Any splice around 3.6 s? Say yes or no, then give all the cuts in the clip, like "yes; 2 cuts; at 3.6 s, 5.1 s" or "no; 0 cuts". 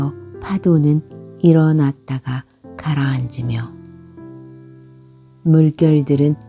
yes; 2 cuts; at 3.6 s, 4.9 s